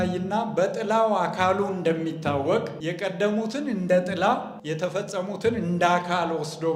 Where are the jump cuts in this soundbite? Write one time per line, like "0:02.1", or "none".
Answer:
0:02.8
0:04.5